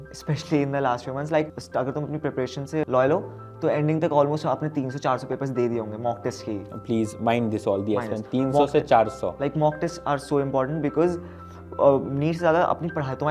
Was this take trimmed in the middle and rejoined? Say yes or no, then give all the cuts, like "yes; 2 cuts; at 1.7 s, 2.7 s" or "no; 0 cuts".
yes; 2 cuts; at 1.6 s, 2.9 s